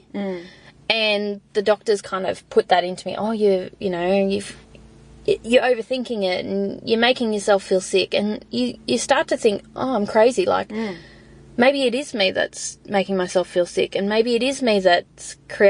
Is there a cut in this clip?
no; 0 cuts

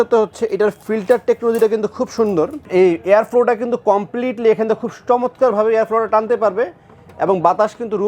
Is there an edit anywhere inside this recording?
yes; 1 cut; at 2.6 s

